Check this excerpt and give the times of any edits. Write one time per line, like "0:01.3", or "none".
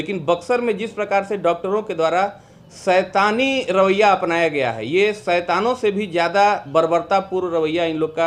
none